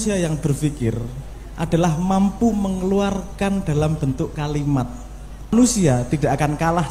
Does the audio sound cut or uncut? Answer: cut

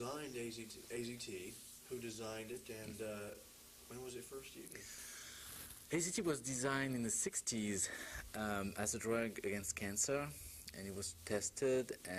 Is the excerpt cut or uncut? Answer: cut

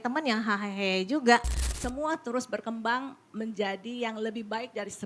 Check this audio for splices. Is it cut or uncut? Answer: cut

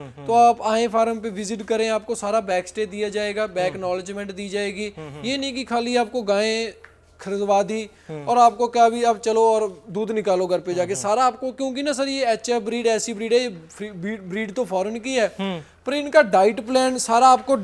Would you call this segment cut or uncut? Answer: uncut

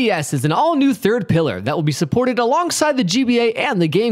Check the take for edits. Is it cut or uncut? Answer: uncut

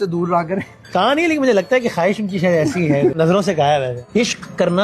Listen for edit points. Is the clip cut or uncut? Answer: cut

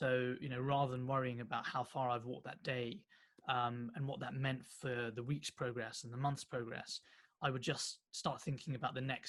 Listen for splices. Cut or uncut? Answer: uncut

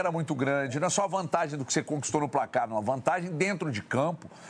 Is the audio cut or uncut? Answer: uncut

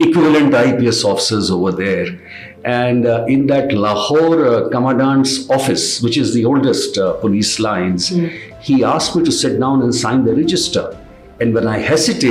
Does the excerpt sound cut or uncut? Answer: uncut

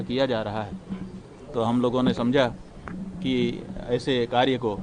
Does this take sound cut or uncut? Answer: uncut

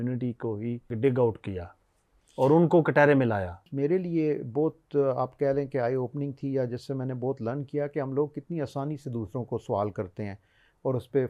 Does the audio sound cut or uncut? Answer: cut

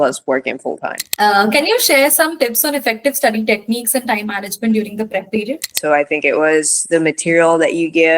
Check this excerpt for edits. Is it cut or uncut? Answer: cut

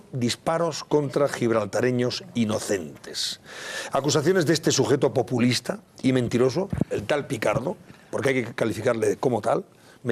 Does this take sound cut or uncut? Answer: cut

